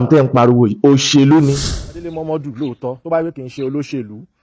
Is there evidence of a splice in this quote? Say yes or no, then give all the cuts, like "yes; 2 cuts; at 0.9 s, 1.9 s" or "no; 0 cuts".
yes; 1 cut; at 2.1 s